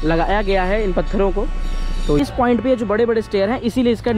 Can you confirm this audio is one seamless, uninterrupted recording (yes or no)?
no